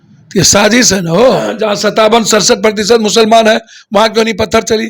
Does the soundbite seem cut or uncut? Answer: cut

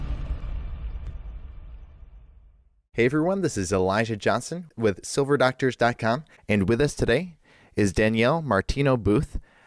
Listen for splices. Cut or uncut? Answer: cut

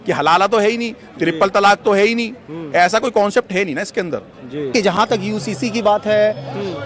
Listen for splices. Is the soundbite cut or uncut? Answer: cut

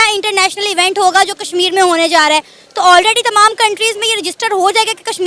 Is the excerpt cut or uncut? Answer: uncut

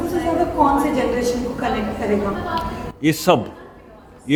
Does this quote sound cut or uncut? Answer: uncut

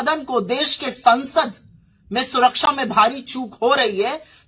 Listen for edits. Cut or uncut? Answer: uncut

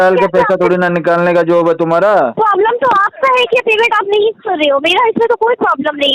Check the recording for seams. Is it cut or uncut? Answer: cut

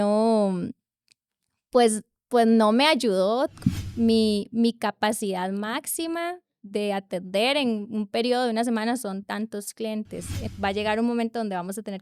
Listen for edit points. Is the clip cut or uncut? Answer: cut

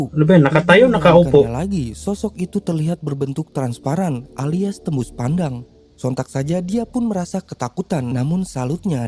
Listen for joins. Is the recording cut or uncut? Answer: uncut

